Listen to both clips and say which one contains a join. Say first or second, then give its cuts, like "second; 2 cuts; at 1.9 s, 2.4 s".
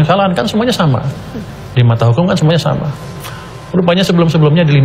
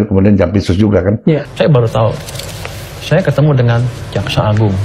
second; 1 cut; at 1.5 s